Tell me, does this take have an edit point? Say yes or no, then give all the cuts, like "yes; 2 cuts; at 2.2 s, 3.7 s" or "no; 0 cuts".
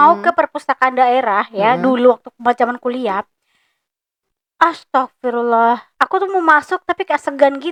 no; 0 cuts